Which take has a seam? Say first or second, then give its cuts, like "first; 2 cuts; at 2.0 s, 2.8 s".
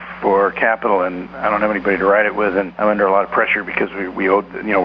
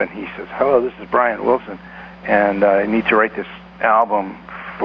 first; 2 cuts; at 1.3 s, 2.7 s